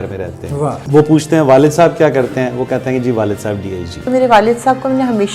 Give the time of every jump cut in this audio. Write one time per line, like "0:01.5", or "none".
0:00.8
0:04.0